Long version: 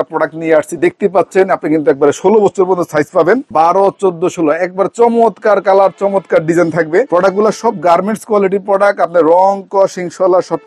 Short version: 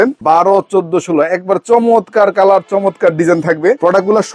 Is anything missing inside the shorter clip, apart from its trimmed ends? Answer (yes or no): no